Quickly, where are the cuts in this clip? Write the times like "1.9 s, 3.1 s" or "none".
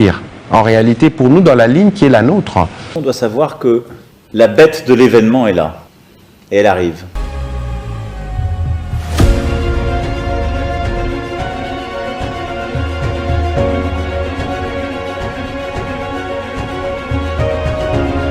2.8 s